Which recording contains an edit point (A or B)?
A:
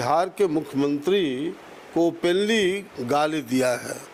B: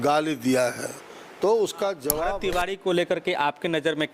B